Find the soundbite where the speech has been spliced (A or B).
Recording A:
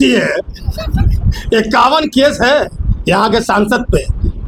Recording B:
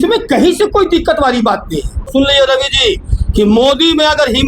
B